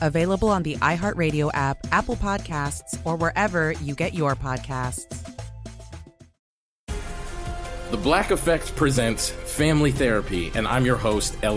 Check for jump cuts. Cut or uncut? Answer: cut